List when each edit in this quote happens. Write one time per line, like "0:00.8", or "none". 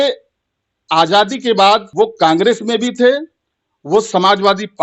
0:01.9